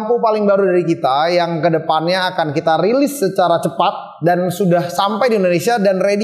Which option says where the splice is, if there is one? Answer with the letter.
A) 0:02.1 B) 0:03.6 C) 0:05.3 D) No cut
D